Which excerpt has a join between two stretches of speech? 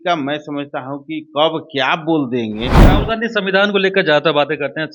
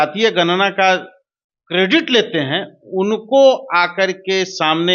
first; 1 cut; at 2.8 s

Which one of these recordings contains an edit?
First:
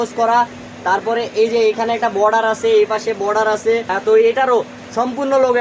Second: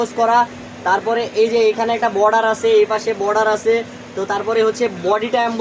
first; 1 cut; at 3.9 s

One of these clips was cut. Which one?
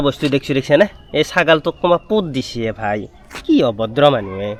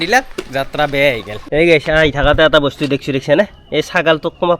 second; 1 cut; at 1.4 s

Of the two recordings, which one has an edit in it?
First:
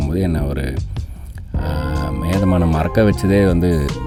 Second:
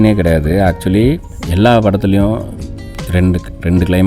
second; 1 cut; at 1.4 s

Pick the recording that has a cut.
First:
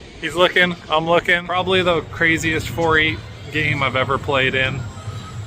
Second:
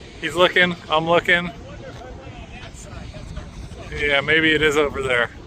first; 1 cut; at 1.5 s

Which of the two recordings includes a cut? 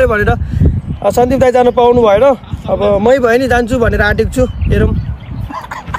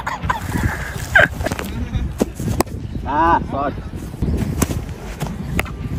second; 2 cuts; at 1.5 s, 4.2 s

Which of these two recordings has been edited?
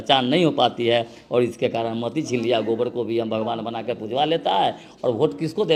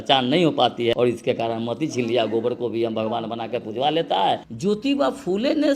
second; 2 cuts; at 0.9 s, 4.5 s

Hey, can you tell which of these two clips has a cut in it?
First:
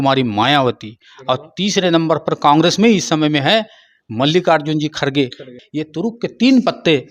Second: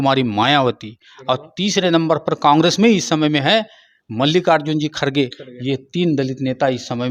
first; 1 cut; at 5.6 s

